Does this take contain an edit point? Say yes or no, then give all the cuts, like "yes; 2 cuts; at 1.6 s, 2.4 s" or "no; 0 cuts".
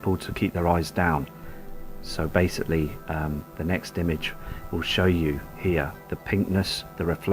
yes; 1 cut; at 3.6 s